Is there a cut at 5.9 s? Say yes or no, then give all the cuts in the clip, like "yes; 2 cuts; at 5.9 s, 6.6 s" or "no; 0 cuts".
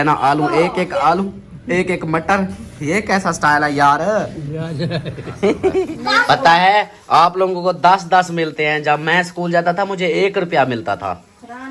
yes; 1 cut; at 5.9 s